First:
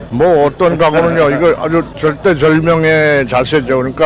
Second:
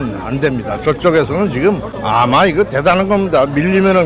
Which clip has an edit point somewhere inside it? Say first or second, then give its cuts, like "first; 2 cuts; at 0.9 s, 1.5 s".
second; 1 cut; at 1.9 s